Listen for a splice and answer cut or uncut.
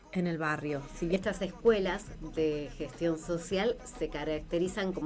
cut